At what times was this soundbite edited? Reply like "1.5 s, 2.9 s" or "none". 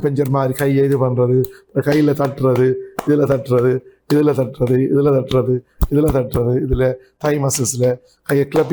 none